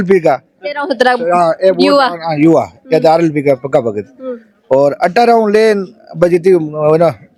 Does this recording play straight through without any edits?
yes; 0 cuts

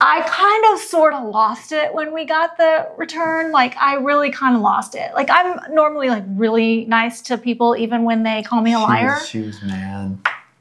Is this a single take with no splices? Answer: yes; 0 cuts

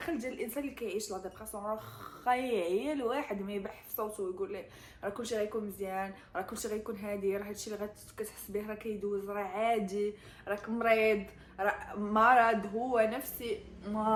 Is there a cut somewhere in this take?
no; 0 cuts

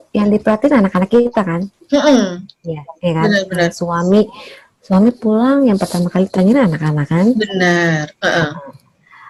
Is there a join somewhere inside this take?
no; 0 cuts

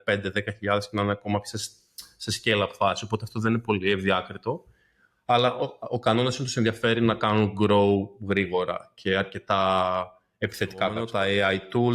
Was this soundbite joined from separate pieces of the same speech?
yes; 1 cut; at 11.0 s

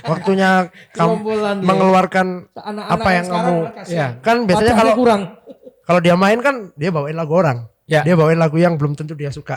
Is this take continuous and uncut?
yes; 0 cuts

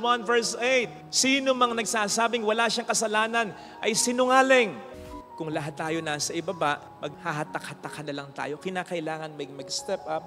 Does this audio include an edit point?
yes; 1 cut; at 4.9 s

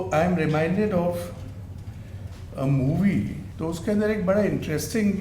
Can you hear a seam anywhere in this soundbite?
yes; 1 cut; at 3.4 s

